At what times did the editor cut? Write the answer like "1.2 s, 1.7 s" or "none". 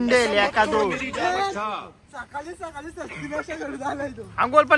1.7 s